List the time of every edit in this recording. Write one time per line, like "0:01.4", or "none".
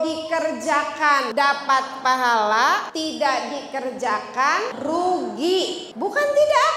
0:01.3
0:02.9
0:04.7
0:05.8